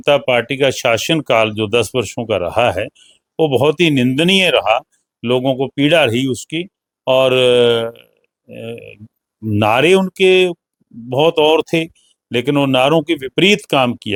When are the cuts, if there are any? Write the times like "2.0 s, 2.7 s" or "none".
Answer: none